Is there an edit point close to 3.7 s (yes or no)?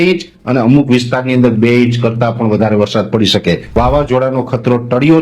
yes